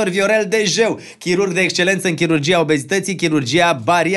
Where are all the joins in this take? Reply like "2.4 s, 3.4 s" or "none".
none